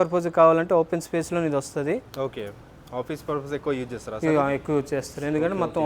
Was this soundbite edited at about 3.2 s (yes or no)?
no